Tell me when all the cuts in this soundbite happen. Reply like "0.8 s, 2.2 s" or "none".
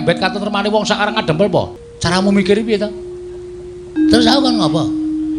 1.7 s